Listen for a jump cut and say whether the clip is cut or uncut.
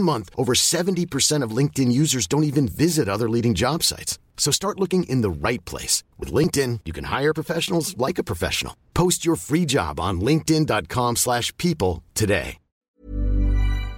cut